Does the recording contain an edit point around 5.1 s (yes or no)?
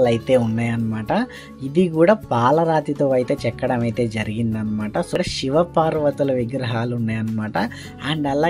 yes